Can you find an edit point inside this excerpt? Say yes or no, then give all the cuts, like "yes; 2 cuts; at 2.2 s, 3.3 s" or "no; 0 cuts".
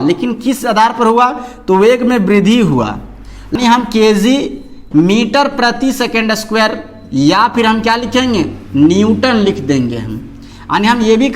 yes; 1 cut; at 3.5 s